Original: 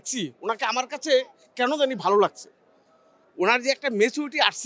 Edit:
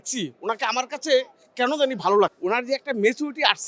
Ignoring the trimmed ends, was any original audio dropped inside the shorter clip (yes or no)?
yes